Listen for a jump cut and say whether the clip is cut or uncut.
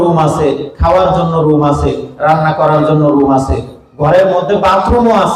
uncut